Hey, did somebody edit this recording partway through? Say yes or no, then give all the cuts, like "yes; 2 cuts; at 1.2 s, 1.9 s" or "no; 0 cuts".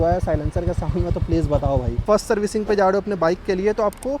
yes; 1 cut; at 2.0 s